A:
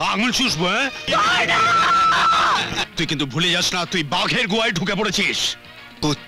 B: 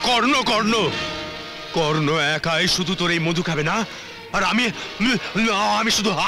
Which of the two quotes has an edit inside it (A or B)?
A